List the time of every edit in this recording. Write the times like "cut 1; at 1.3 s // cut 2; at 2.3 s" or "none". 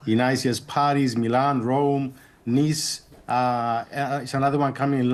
none